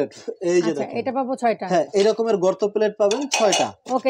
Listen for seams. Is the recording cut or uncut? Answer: uncut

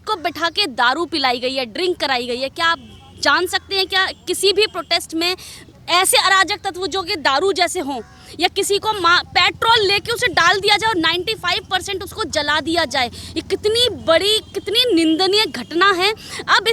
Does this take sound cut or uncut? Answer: uncut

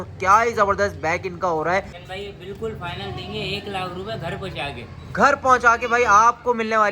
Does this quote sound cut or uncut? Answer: cut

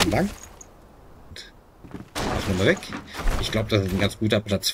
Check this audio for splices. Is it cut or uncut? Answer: cut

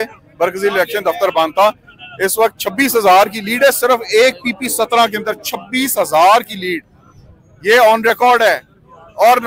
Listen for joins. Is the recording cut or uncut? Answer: uncut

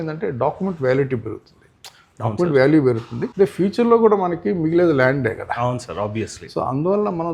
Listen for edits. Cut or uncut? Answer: uncut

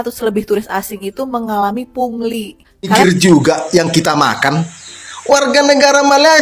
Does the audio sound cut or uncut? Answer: cut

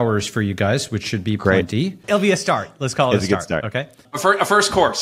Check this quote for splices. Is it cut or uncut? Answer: cut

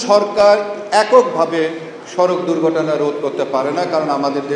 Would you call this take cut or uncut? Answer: uncut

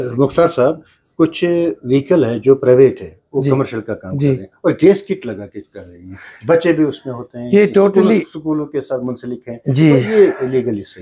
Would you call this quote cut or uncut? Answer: uncut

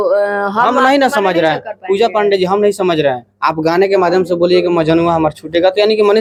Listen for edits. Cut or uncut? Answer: uncut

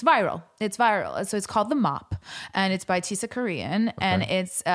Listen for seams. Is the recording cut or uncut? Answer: uncut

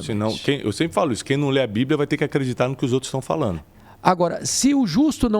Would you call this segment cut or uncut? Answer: cut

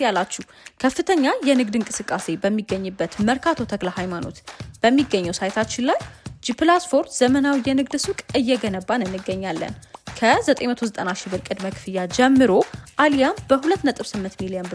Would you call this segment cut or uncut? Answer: uncut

